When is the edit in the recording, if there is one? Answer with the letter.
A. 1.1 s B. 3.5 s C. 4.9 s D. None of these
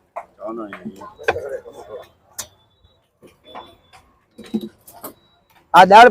A